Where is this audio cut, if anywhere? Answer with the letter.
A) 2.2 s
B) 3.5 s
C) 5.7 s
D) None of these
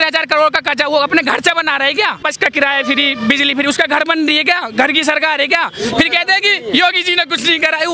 A